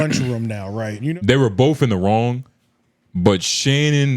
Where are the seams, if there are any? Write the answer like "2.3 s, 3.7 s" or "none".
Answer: 1.0 s